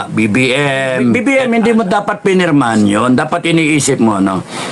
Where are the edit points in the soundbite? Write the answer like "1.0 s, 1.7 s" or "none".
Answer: 1.2 s

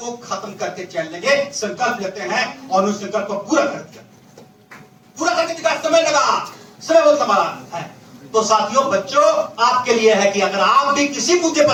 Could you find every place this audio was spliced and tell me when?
none

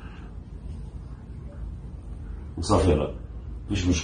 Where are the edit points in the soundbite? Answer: none

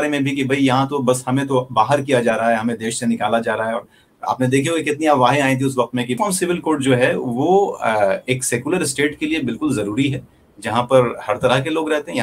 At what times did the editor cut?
6.2 s

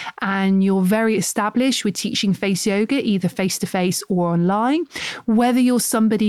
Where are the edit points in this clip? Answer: none

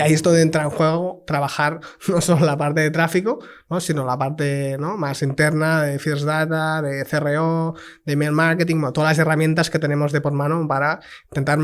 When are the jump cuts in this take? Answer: none

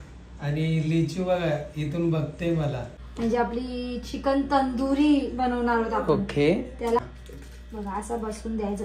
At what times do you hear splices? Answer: 2.9 s, 7.0 s

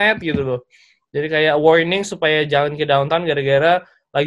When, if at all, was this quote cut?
none

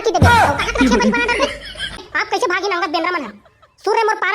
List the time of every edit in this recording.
2.1 s

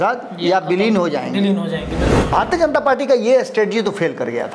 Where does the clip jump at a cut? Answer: 2.1 s

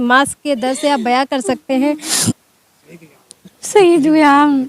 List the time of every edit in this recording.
2.1 s

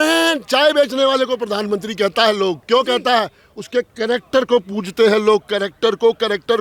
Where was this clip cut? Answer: none

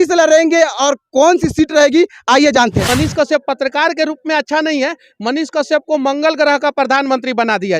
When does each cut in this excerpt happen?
2.9 s

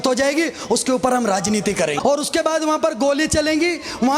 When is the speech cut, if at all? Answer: 2.0 s

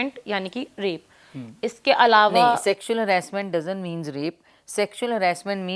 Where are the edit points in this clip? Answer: none

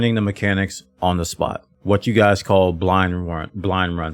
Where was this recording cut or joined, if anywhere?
1.7 s

